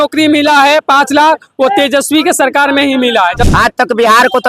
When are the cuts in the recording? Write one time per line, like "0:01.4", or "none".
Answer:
0:03.4